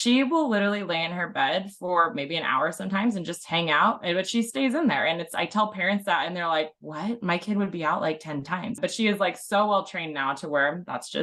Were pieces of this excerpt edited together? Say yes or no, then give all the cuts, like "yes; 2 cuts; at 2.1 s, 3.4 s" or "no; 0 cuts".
yes; 1 cut; at 8.7 s